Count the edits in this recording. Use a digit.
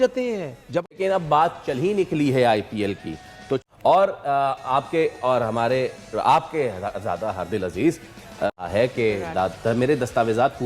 3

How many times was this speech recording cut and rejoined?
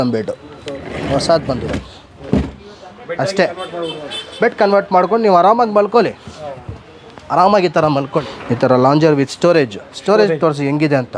2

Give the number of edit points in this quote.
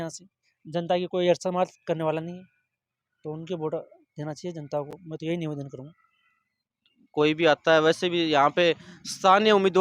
0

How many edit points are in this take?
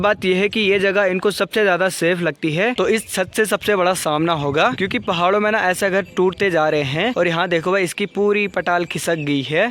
3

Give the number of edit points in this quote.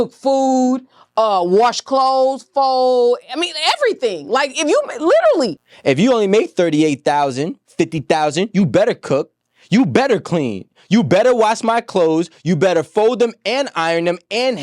1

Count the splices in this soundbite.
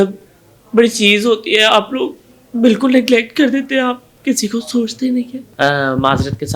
1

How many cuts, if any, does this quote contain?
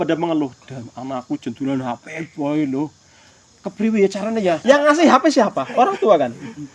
1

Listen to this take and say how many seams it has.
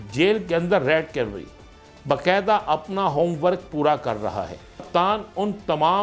1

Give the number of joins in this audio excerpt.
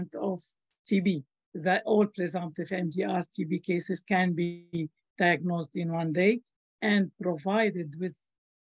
1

